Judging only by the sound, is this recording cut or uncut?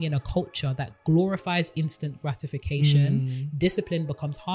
uncut